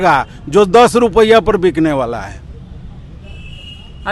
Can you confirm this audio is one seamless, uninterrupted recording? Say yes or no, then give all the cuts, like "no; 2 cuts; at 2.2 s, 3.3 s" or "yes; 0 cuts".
yes; 0 cuts